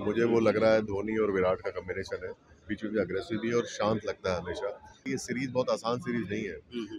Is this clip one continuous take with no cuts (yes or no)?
no